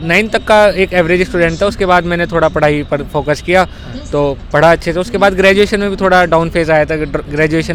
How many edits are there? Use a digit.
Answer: 0